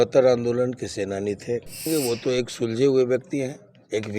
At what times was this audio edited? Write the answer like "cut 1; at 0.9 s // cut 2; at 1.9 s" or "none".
cut 1; at 1.9 s